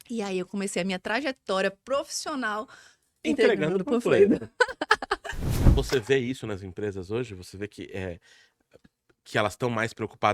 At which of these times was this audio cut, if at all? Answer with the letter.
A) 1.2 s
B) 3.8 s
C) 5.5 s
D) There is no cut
C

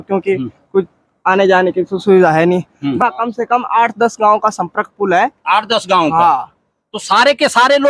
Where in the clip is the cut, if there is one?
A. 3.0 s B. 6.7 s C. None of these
A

